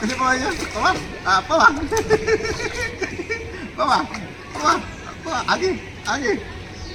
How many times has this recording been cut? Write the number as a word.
zero